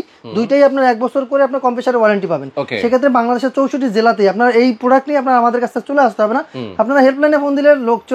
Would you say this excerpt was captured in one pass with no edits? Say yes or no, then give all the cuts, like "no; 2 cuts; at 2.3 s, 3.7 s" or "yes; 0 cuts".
yes; 0 cuts